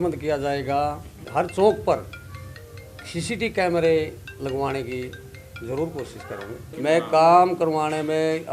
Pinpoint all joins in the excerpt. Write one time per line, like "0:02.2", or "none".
0:01.2
0:06.7